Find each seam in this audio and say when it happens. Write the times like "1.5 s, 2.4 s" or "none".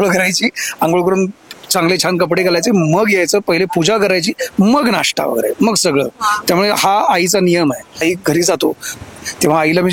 8.0 s